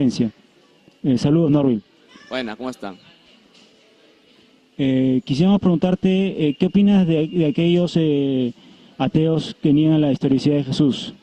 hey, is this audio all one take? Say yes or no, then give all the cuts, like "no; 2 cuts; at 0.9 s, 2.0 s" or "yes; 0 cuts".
yes; 0 cuts